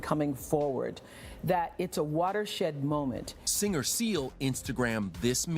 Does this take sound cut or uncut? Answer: cut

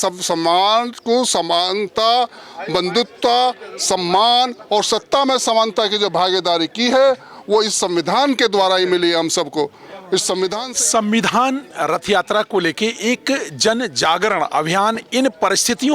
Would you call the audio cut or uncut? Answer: cut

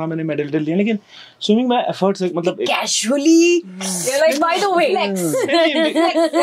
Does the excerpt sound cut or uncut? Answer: uncut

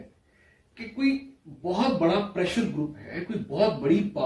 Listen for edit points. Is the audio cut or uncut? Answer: uncut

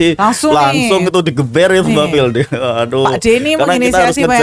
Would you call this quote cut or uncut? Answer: uncut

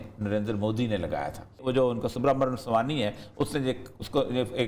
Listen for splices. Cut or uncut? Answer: cut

